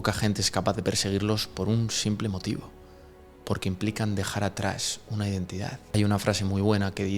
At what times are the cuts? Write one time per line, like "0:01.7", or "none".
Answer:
0:05.9